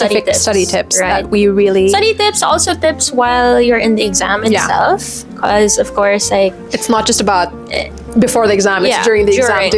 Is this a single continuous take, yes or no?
yes